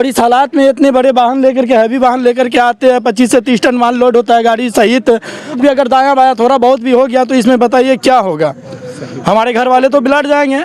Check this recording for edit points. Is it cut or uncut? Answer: cut